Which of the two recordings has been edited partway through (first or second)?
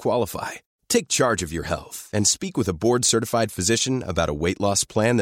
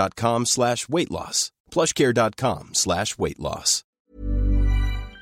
second